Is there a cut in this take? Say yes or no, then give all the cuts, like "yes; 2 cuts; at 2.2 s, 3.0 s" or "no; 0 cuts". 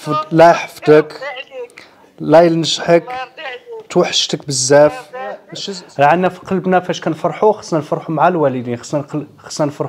yes; 1 cut; at 5.5 s